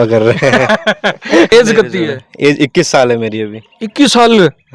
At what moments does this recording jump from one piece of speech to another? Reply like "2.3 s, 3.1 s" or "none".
1.5 s